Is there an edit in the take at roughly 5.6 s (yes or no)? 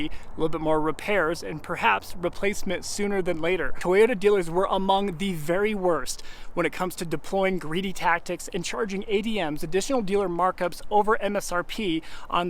no